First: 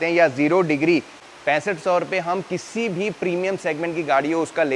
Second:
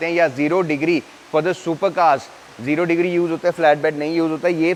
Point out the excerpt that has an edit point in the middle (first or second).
first